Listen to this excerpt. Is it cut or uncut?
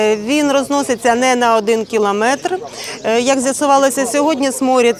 uncut